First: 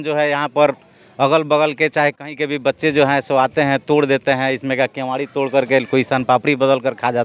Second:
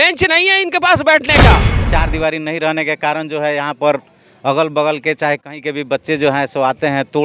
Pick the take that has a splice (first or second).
second